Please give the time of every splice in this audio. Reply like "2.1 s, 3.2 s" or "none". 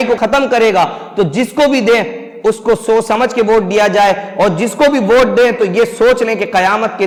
none